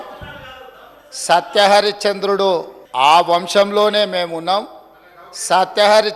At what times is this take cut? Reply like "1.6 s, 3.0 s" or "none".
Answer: 2.8 s